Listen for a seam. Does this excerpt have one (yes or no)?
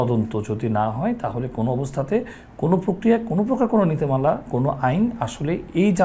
no